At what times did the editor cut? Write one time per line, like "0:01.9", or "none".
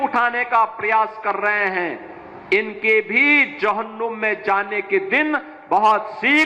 none